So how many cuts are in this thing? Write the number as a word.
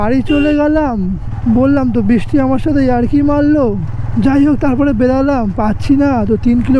zero